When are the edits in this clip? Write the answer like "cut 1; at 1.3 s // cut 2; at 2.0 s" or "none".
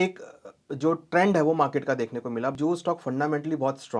cut 1; at 2.6 s